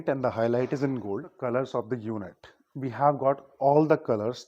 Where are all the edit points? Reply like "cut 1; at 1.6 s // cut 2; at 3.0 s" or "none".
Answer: cut 1; at 1.3 s

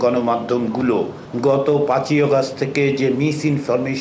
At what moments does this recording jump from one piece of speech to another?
cut 1; at 1.2 s

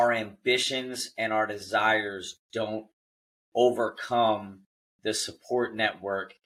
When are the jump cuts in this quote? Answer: none

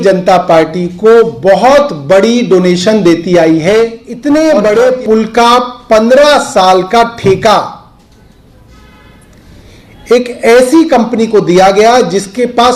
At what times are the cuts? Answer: cut 1; at 4.1 s

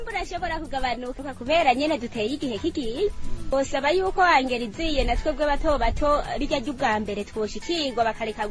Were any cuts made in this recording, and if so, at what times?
cut 1; at 1.2 s

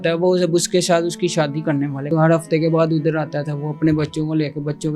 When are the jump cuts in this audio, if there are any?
cut 1; at 2.1 s

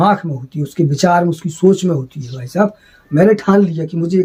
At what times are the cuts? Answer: none

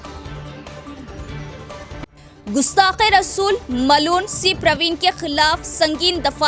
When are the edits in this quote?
none

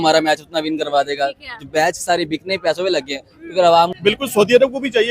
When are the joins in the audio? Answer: cut 1; at 3.9 s

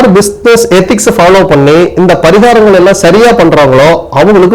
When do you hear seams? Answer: none

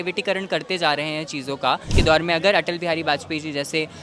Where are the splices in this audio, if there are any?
cut 1; at 1.9 s

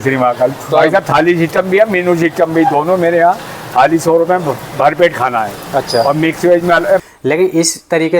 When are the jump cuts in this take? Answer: cut 1; at 7.0 s

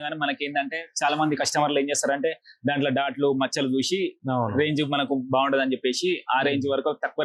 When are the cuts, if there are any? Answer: none

